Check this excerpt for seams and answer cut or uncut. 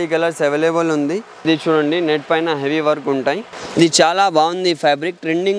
cut